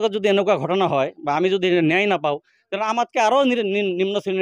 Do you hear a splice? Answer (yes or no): no